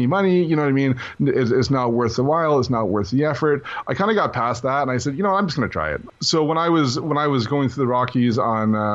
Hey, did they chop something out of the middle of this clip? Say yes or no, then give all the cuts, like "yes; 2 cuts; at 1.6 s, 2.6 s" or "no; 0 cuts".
yes; 2 cuts; at 3.7 s, 6.1 s